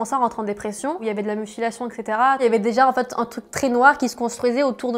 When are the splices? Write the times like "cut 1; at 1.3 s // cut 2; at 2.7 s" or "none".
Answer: cut 1; at 1.0 s // cut 2; at 2.4 s